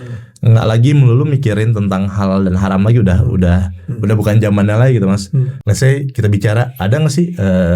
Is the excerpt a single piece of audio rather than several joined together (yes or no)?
no